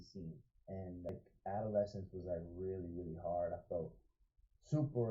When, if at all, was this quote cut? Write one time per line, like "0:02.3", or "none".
0:01.1